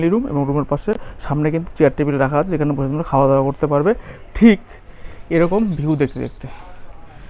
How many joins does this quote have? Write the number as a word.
zero